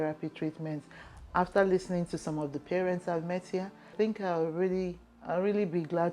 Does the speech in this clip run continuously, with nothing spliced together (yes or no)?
no